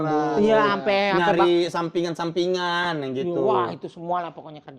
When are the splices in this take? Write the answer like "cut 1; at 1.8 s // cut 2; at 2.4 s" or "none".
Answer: none